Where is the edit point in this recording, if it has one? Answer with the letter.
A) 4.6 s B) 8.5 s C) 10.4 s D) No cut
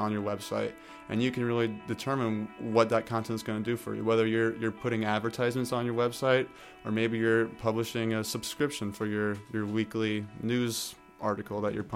B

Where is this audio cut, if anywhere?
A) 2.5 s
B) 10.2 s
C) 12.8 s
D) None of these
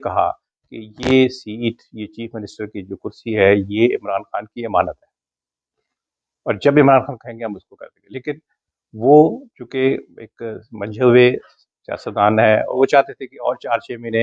C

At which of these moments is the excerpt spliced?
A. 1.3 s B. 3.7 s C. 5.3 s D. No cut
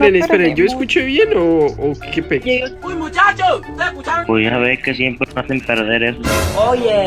D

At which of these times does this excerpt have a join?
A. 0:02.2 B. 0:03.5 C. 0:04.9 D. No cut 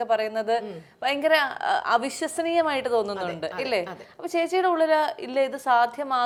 D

